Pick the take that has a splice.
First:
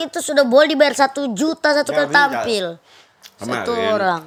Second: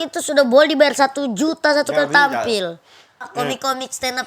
second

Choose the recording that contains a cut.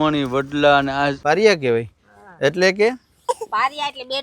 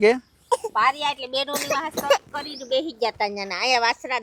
first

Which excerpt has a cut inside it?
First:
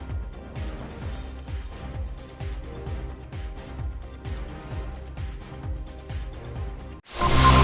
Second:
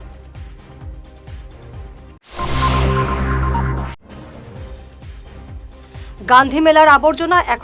second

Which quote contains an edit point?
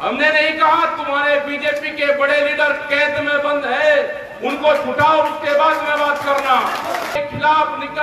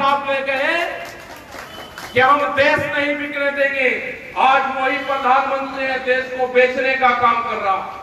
first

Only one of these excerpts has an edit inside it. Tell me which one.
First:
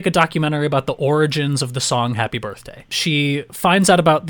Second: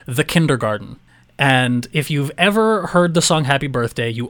first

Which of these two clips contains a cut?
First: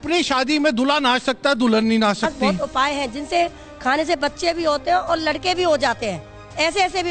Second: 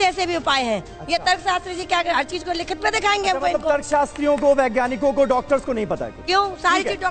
first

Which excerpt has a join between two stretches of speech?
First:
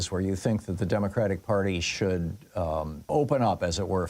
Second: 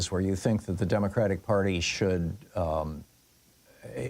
first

